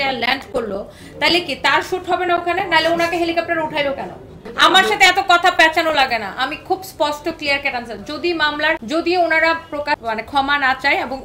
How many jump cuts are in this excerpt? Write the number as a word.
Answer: three